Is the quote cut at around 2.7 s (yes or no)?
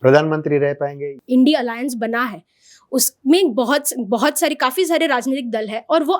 no